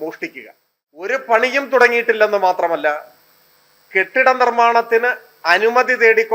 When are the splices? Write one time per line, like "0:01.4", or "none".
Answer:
0:01.1